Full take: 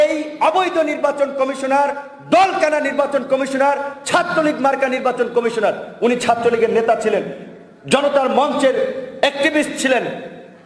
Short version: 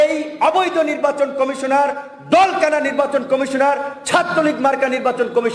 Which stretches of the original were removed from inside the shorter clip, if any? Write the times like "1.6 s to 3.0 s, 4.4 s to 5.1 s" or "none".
none